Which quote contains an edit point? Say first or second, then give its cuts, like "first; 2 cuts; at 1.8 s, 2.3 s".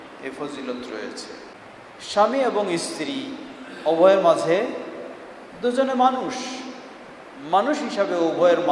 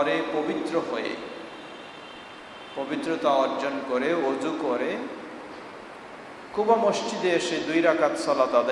first; 1 cut; at 1.6 s